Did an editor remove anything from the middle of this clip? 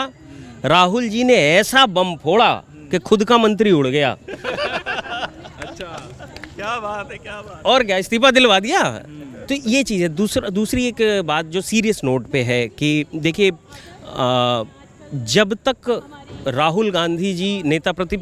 no; 0 cuts

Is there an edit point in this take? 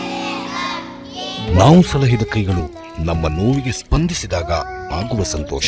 no; 0 cuts

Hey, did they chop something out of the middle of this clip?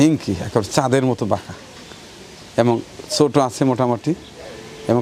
no; 0 cuts

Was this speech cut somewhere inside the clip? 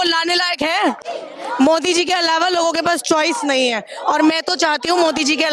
no; 0 cuts

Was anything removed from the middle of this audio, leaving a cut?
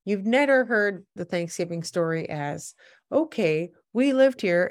yes; 1 cut; at 1.2 s

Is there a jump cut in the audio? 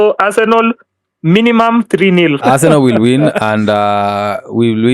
yes; 1 cut; at 2.4 s

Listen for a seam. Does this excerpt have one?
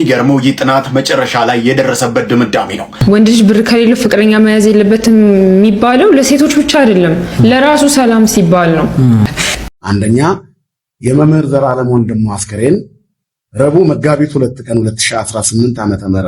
yes; 2 cuts; at 2.9 s, 9.6 s

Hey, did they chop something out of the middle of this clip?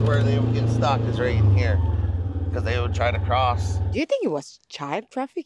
yes; 1 cut; at 3.8 s

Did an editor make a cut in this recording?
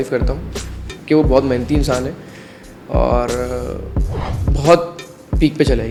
no; 0 cuts

